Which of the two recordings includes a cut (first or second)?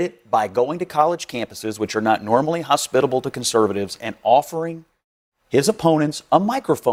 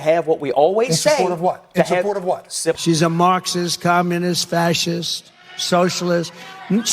second